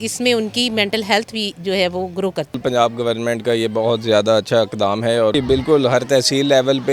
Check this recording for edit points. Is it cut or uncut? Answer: cut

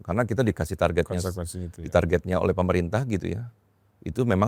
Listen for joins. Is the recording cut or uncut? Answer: uncut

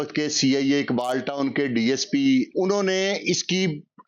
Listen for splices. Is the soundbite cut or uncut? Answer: cut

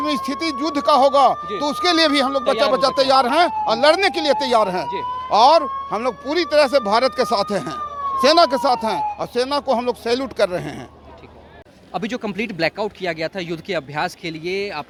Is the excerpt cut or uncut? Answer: uncut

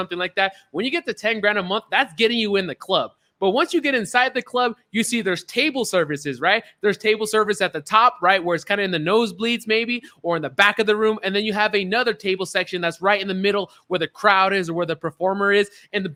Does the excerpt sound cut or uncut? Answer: uncut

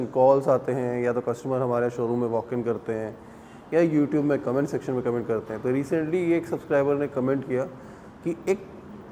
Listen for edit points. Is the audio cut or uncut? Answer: uncut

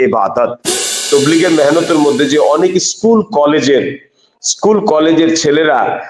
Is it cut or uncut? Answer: cut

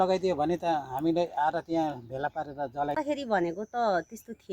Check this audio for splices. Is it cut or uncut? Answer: cut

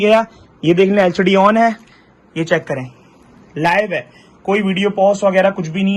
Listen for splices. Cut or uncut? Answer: uncut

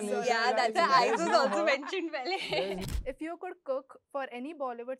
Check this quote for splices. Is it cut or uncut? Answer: cut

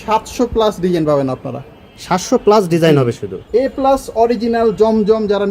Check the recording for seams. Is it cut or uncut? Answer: cut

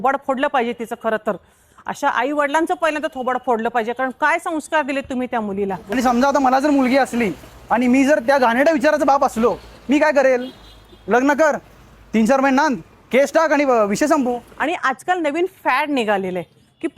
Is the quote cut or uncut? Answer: cut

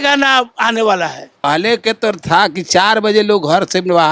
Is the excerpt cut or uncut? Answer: cut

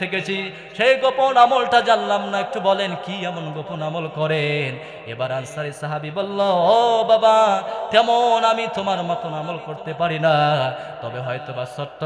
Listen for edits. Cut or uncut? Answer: uncut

